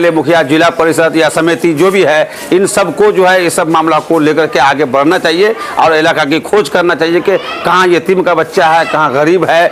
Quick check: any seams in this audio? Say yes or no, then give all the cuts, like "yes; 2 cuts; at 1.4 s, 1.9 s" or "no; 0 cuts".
no; 0 cuts